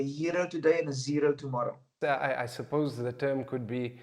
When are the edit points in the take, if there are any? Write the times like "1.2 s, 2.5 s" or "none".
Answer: 1.9 s